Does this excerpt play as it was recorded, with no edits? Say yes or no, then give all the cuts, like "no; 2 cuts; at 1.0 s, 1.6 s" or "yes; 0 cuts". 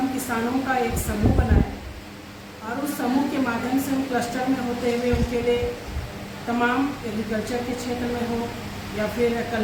yes; 0 cuts